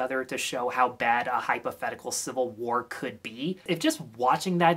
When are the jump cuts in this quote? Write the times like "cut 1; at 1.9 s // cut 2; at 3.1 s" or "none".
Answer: cut 1; at 3.6 s